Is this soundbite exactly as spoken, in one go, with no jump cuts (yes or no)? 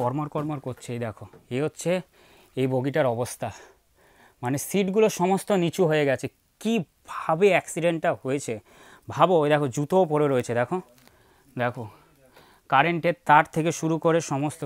yes